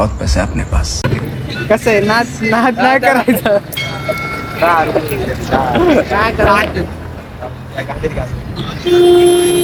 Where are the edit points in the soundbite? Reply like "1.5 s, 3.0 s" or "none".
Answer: none